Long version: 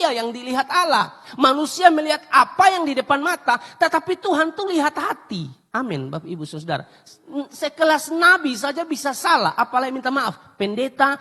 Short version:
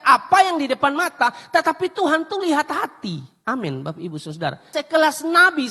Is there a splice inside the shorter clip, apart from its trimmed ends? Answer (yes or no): yes